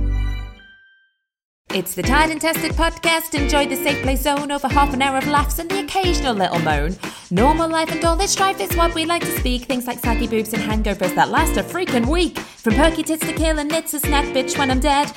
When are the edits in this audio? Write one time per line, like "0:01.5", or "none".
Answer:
0:01.6